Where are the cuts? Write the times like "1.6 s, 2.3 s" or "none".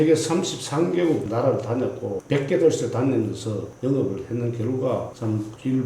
1.3 s, 2.2 s